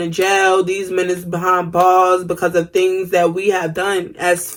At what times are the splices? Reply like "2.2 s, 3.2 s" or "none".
none

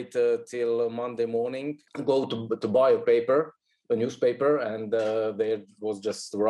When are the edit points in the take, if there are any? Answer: none

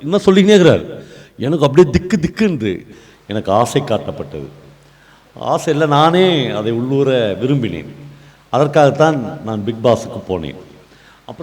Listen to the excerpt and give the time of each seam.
2.9 s

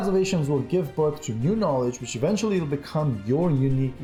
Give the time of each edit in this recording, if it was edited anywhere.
none

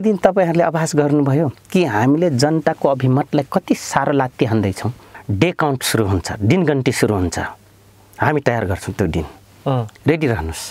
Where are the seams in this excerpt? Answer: 5.1 s

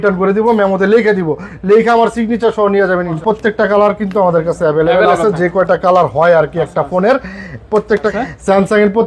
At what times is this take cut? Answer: 3.2 s, 8.1 s

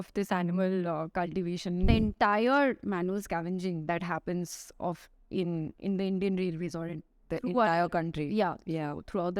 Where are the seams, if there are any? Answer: 1.9 s

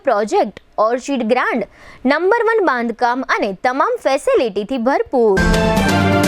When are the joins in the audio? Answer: 5.4 s

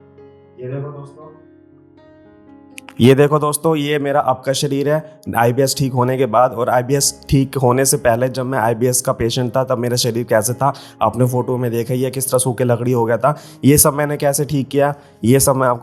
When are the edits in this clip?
1.3 s, 3.0 s

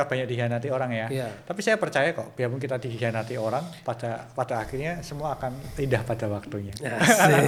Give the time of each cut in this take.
none

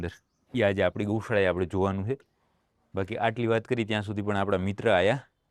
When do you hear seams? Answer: none

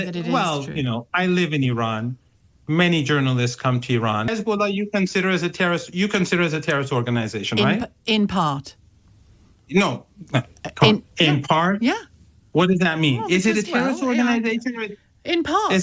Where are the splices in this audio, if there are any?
4.3 s

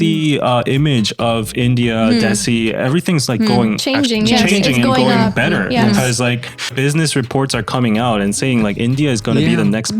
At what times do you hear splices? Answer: 6.7 s

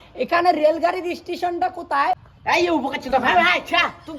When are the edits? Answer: none

